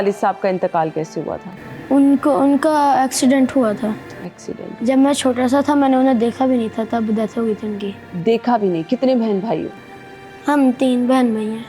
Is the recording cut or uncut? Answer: uncut